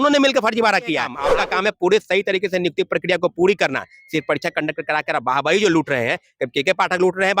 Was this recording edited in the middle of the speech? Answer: yes; 1 cut; at 1.2 s

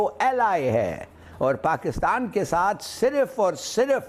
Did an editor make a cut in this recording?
no; 0 cuts

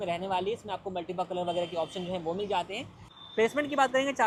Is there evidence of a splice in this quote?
no; 0 cuts

